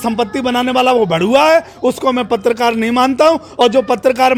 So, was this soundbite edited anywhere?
no; 0 cuts

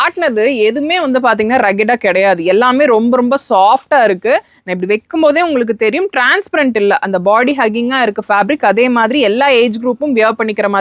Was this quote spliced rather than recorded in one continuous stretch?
no; 0 cuts

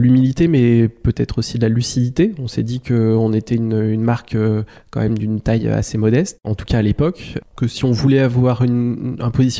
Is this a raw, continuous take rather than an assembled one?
yes; 0 cuts

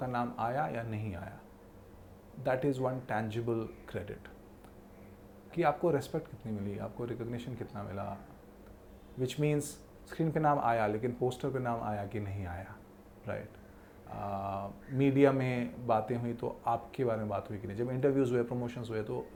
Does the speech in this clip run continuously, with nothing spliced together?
yes; 0 cuts

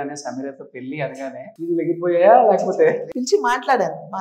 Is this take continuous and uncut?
no; 2 cuts; at 1.5 s, 3.1 s

